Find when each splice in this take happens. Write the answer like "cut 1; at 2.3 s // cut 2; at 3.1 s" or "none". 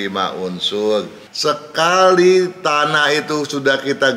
cut 1; at 1.2 s